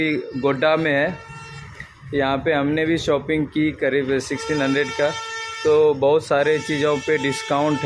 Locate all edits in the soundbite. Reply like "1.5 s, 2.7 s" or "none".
none